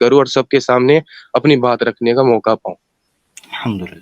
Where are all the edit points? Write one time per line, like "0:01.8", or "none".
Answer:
none